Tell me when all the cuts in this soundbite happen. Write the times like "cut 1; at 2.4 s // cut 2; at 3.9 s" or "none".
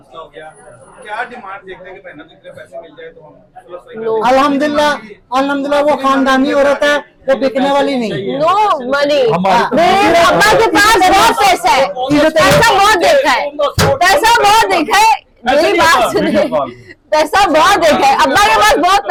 none